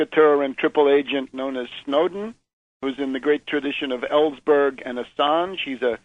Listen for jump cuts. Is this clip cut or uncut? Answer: cut